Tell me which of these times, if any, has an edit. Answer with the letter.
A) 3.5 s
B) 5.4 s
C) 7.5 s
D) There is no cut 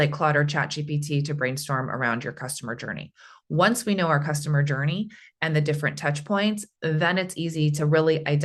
D